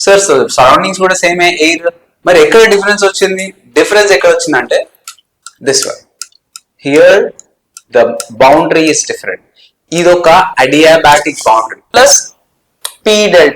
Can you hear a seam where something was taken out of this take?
yes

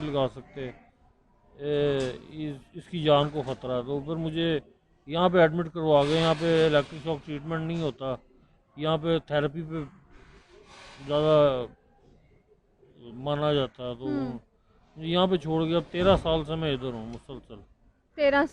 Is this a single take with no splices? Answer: yes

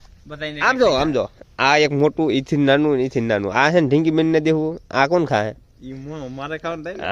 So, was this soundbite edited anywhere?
no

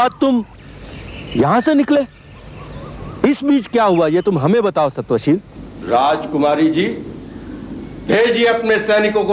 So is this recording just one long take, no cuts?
no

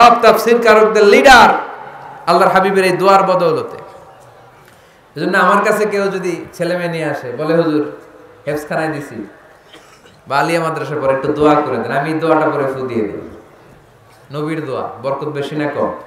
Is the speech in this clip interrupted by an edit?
no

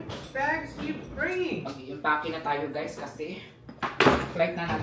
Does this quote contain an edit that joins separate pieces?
no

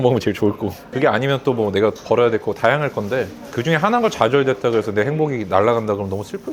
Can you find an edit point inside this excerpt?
yes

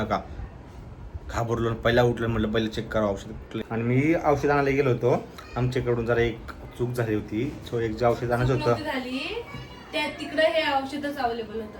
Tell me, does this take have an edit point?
yes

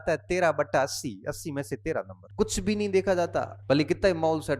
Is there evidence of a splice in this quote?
yes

